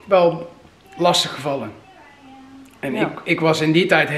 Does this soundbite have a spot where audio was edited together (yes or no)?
no